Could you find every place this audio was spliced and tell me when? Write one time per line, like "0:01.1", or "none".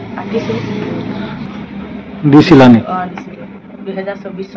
0:01.6